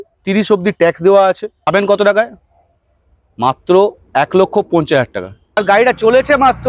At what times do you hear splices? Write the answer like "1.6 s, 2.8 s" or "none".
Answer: 1.7 s, 5.6 s